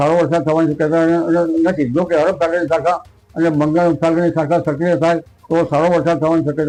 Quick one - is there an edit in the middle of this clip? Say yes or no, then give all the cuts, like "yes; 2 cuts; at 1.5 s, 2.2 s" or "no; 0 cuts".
no; 0 cuts